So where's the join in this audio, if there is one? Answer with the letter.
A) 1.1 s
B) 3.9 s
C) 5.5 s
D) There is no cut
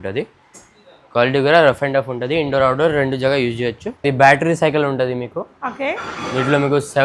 B